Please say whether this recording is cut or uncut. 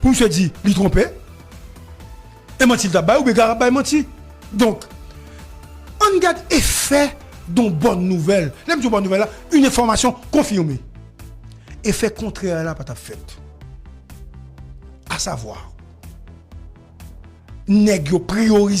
cut